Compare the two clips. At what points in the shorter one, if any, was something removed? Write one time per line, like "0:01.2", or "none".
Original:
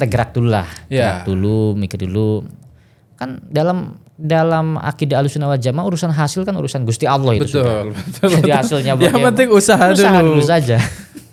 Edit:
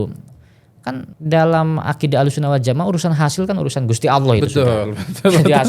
0:01.0